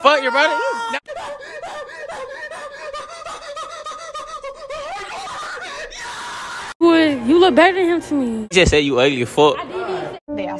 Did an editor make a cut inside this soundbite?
yes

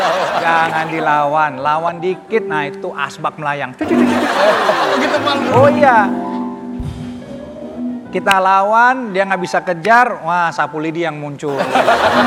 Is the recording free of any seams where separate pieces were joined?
yes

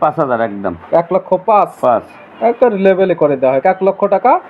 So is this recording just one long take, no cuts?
yes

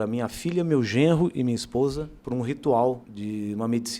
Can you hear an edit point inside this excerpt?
yes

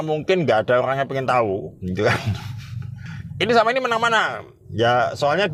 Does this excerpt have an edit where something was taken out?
no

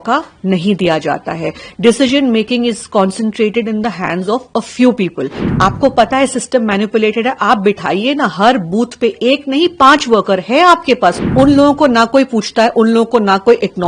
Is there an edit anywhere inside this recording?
yes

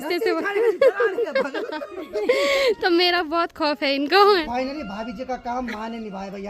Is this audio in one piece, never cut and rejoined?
no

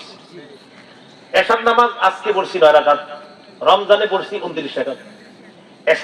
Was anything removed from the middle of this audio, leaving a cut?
no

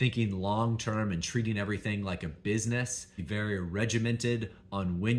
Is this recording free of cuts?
no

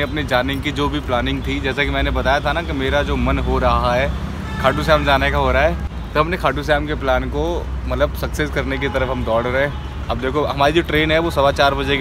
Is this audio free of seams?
yes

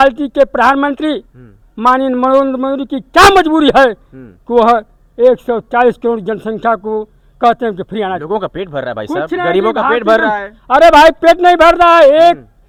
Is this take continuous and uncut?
yes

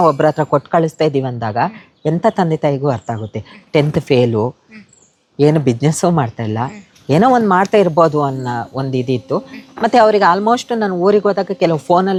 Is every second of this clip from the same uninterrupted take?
yes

